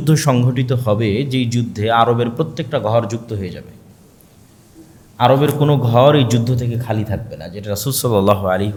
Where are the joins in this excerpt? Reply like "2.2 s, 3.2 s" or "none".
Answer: none